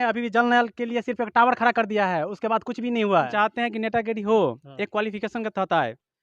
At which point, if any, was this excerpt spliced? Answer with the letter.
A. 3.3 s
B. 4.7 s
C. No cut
A